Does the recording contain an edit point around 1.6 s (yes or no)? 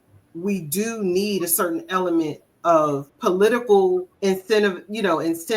no